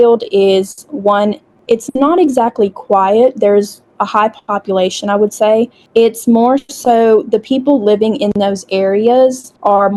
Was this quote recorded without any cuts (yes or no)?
yes